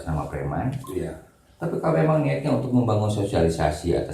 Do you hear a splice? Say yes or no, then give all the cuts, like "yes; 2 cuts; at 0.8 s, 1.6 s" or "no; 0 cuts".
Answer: no; 0 cuts